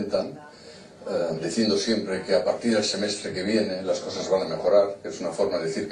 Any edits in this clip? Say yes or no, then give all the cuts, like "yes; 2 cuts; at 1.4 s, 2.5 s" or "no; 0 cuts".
no; 0 cuts